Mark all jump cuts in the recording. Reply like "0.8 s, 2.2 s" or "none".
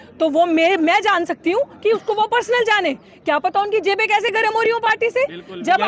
none